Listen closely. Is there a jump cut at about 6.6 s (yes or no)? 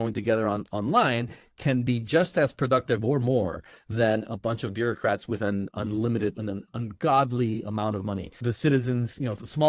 no